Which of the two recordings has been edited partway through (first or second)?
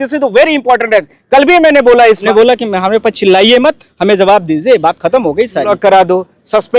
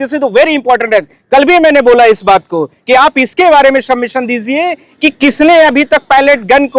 first